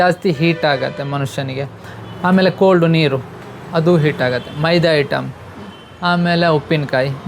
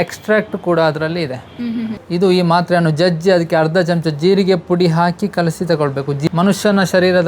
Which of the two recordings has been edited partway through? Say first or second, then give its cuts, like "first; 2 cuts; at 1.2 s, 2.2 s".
second; 2 cuts; at 2.0 s, 6.3 s